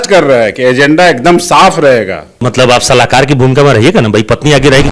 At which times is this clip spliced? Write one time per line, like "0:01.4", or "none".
0:02.5